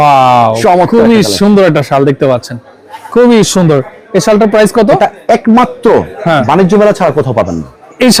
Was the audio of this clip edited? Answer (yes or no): no